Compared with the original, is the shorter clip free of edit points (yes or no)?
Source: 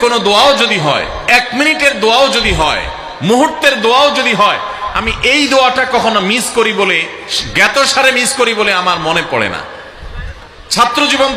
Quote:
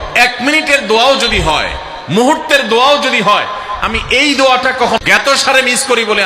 no